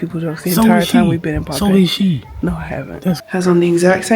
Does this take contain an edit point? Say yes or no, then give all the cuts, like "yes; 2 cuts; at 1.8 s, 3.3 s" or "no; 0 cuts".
yes; 1 cut; at 3.2 s